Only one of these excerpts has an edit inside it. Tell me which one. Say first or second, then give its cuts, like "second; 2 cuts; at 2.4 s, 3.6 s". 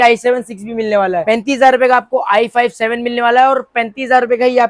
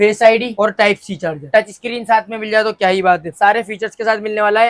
second; 2 cuts; at 1.4 s, 3.3 s